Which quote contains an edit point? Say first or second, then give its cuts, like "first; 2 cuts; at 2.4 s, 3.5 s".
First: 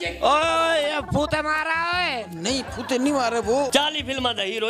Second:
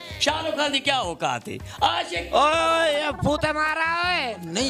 first; 1 cut; at 3.7 s